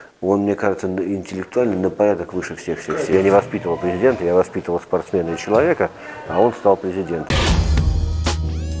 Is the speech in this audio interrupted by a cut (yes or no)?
yes